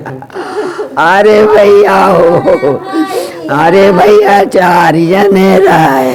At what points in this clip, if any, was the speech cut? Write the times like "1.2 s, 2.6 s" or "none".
none